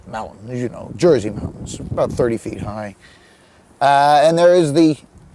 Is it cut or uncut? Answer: uncut